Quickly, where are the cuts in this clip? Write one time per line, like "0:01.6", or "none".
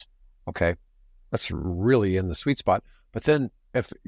none